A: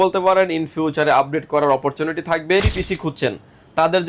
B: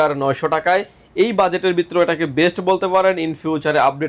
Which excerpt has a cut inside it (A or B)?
A